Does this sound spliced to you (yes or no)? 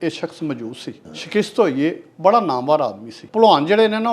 yes